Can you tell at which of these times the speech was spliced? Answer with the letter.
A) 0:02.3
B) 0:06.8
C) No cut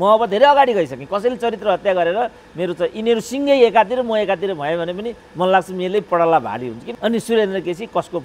B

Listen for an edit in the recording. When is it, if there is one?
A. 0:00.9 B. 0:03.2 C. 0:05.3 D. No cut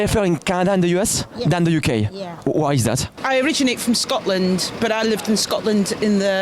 B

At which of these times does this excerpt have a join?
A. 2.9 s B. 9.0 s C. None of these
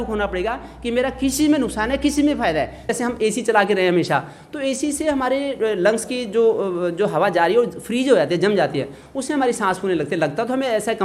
A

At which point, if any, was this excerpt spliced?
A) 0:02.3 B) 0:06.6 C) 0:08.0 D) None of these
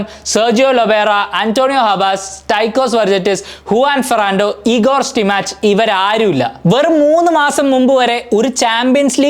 B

